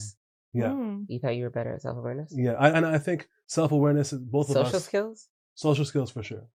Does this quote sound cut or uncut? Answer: uncut